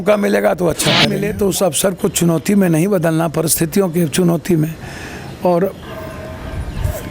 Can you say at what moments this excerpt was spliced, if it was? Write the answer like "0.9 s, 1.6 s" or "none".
1.2 s